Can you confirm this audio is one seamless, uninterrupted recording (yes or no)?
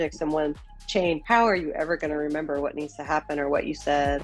no